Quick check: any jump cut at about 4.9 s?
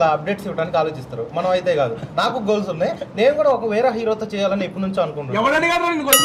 no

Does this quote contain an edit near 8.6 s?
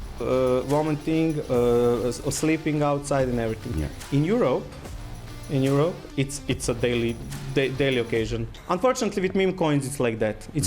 yes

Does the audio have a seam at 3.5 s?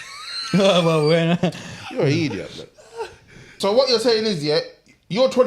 yes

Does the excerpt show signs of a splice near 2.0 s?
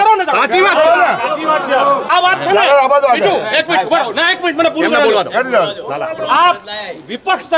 yes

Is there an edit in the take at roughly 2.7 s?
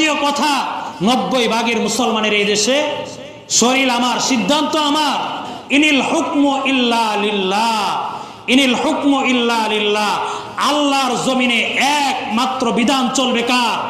no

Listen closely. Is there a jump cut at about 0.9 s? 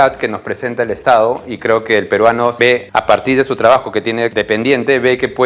no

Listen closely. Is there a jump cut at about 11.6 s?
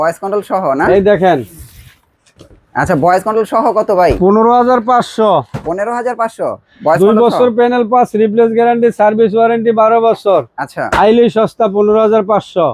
no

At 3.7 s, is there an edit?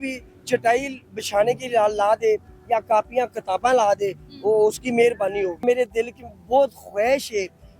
no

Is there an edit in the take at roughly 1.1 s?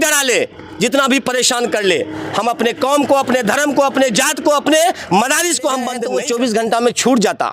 no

